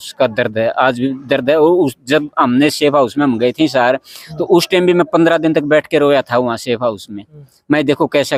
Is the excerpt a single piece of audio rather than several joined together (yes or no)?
yes